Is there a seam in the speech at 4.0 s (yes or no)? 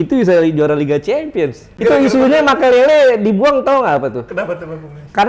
no